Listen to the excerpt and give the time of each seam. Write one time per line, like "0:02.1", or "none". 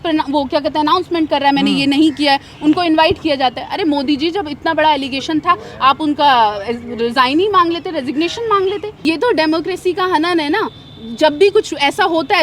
0:09.0

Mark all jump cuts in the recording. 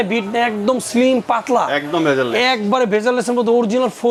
none

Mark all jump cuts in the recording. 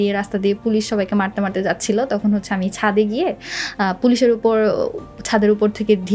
none

